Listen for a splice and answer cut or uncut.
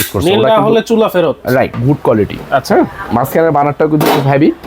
cut